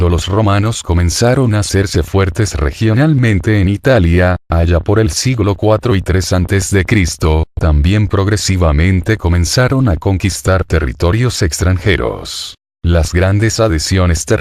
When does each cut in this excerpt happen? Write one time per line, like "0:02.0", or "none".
none